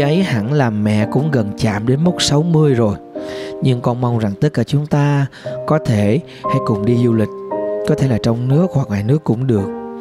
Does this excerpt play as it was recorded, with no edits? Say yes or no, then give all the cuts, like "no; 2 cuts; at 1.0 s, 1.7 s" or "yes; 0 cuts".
yes; 0 cuts